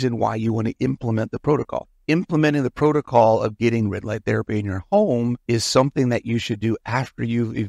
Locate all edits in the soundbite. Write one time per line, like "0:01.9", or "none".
0:05.4